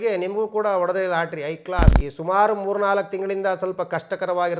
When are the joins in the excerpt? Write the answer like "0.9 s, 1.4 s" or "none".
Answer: 2.0 s